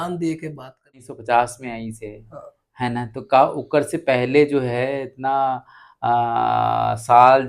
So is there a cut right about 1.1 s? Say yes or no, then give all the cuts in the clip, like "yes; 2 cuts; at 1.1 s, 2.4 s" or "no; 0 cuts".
yes; 1 cut; at 1.1 s